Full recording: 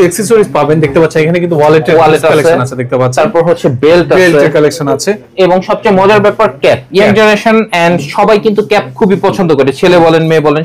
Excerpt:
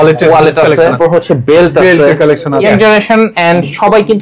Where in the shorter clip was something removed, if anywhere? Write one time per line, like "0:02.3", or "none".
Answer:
0:01.0
0:02.6